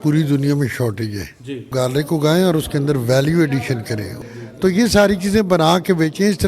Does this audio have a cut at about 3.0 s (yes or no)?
no